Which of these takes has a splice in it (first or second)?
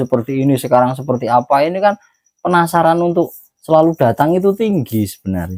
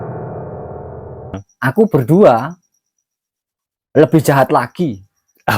second